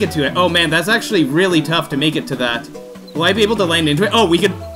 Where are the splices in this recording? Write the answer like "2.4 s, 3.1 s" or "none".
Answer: 2.6 s